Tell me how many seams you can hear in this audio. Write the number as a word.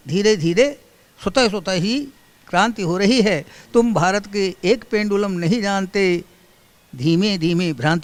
zero